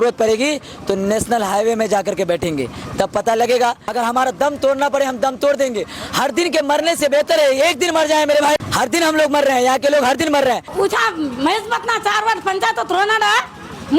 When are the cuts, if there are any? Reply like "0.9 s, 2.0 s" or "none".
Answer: 3.8 s, 8.6 s, 10.7 s